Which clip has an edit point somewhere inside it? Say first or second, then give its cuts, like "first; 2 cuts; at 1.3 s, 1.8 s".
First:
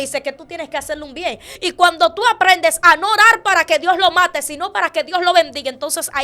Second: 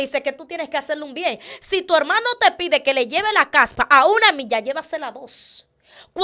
first; 1 cut; at 1.5 s